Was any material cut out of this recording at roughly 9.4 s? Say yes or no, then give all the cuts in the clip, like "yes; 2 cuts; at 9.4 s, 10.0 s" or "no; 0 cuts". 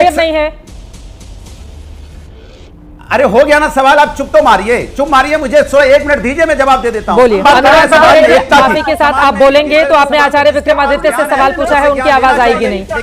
no; 1 cut; at 7.4 s